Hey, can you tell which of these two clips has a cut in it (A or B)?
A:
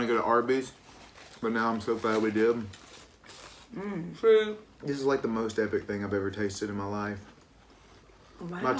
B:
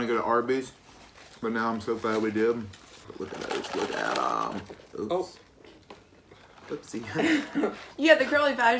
B